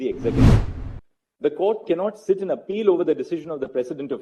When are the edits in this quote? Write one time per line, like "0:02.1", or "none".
none